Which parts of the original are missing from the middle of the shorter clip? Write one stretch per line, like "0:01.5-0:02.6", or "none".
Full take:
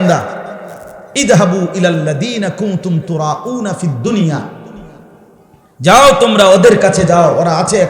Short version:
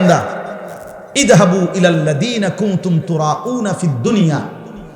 none

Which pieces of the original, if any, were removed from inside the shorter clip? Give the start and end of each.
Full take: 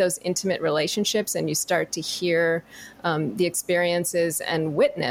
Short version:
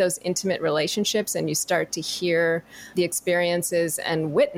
0:02.9-0:03.3

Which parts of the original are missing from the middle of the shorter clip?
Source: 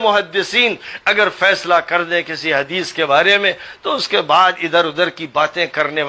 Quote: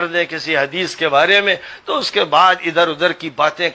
none

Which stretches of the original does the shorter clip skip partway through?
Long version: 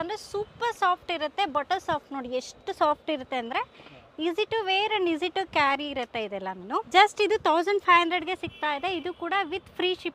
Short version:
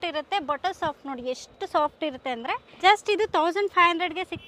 0:03.8-0:06.9

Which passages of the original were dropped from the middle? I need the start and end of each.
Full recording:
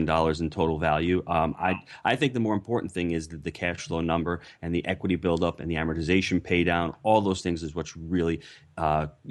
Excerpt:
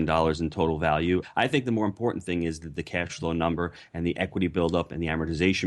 0:01.3-0:01.9

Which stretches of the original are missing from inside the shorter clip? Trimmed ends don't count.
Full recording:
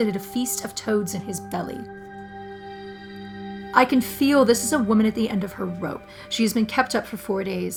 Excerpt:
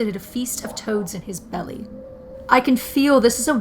0:02.4-0:03.6

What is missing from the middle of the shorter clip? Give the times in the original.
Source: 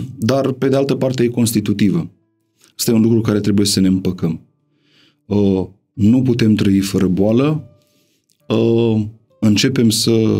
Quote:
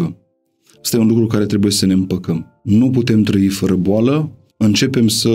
0:04.5-0:05.8
0:07.7-0:09.2

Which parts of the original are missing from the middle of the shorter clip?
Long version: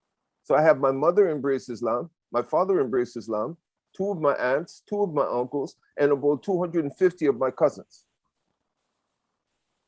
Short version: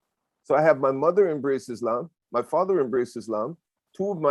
none

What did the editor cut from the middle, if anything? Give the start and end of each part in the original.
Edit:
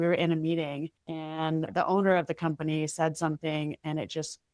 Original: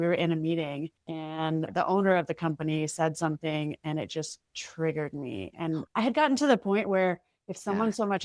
none

